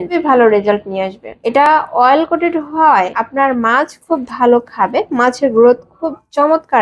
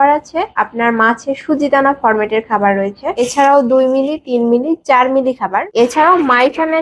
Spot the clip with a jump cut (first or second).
second